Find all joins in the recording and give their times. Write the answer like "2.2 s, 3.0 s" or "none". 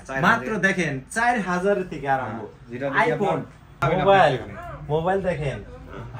3.8 s